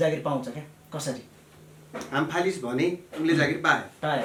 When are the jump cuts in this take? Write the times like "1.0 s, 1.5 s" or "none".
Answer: none